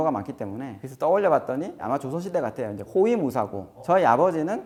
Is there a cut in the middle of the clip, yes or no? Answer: no